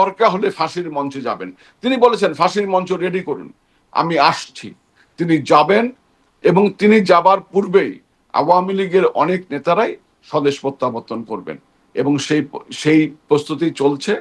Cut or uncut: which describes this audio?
uncut